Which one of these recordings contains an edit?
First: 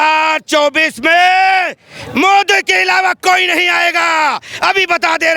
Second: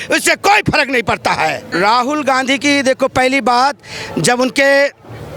second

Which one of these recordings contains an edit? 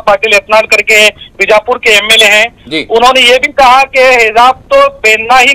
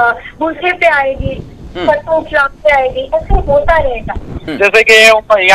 second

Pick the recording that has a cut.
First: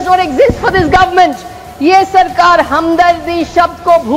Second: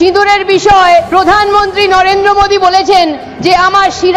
second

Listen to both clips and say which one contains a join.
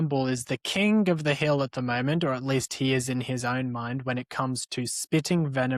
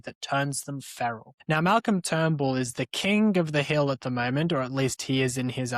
second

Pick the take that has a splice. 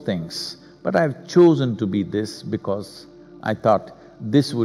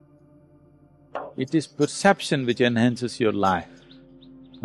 second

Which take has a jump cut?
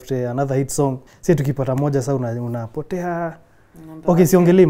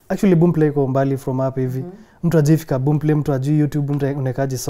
first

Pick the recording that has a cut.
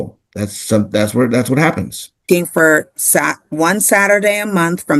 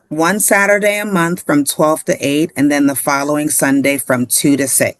first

